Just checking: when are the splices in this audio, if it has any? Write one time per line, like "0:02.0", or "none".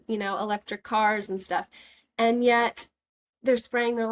none